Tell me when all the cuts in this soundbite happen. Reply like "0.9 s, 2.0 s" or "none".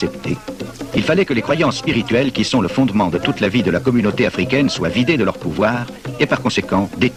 none

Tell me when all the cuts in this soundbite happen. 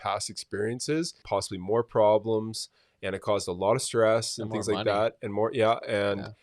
1.2 s

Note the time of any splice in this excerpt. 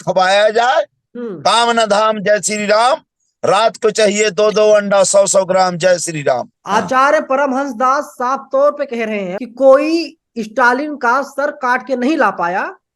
1.0 s, 6.5 s, 9.4 s

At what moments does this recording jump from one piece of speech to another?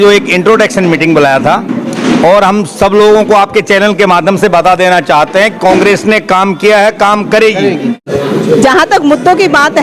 8.1 s

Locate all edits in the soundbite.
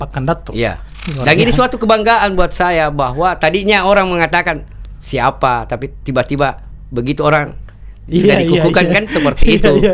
none

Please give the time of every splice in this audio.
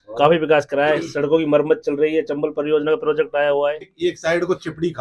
3.9 s

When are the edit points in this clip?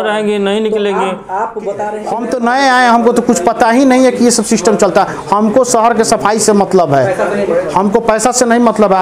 2.1 s

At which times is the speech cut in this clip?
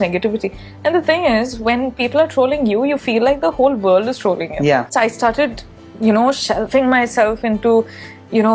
4.9 s

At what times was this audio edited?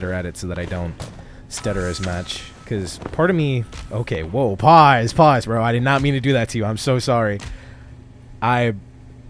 none

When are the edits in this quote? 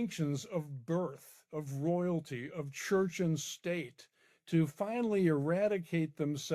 none

